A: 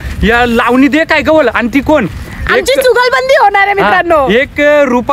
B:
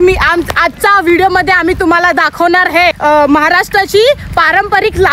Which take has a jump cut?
B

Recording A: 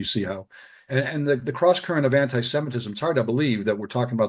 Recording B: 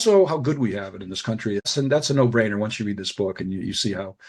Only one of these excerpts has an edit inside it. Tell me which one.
B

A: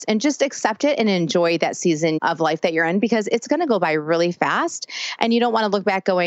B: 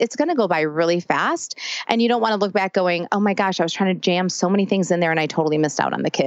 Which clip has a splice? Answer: A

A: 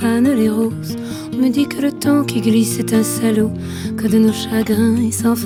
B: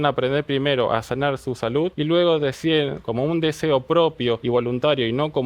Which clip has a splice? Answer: B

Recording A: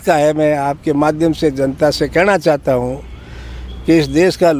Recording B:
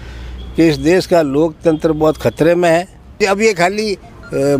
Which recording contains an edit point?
B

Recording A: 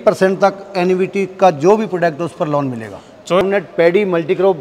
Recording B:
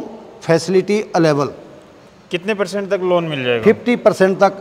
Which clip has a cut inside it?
A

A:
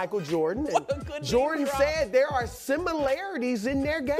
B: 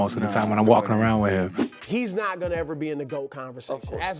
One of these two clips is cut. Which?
B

